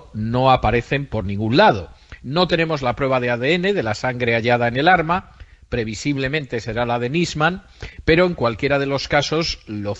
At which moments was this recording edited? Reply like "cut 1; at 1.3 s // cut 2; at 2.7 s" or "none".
cut 1; at 2.6 s